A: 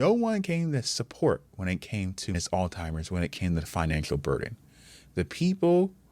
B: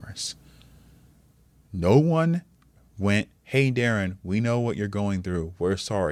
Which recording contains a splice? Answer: A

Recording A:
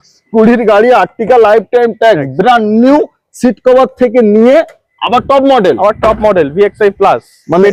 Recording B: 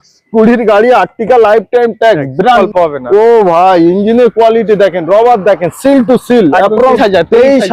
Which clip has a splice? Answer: B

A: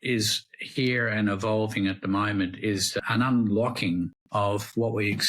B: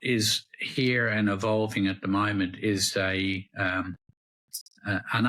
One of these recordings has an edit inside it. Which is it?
A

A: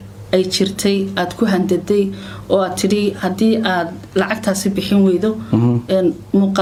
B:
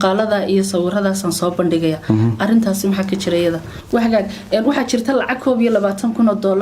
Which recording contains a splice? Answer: B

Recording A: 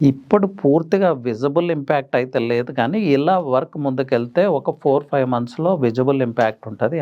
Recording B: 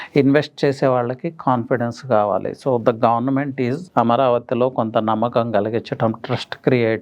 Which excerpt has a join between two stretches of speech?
B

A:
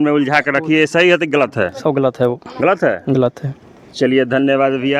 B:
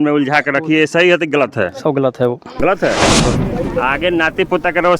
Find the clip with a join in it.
B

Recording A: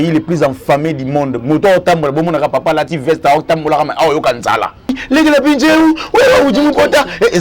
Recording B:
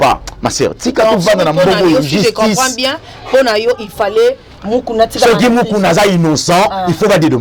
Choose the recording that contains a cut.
A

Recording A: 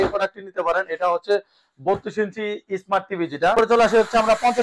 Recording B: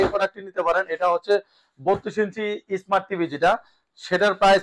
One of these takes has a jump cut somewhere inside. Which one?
A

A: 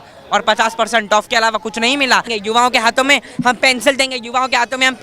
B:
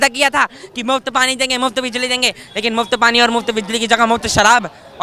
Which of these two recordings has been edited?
A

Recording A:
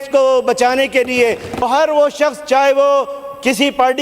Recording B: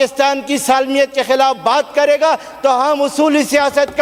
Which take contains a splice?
A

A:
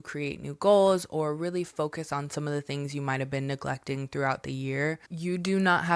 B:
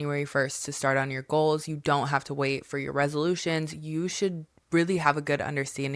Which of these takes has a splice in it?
A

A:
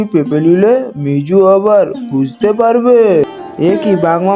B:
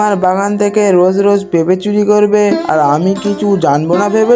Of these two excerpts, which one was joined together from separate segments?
A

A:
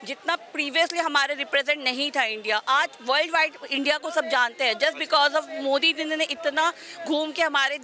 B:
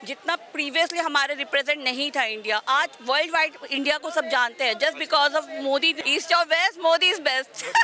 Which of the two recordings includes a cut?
B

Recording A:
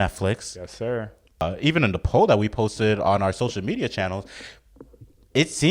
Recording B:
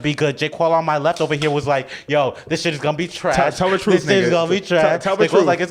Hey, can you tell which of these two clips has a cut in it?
A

